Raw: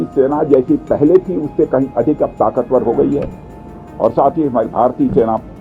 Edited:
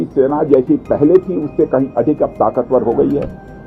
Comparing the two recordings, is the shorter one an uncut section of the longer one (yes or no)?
yes